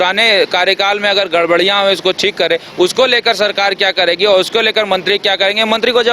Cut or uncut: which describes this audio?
uncut